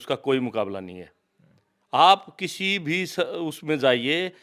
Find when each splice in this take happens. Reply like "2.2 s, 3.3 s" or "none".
none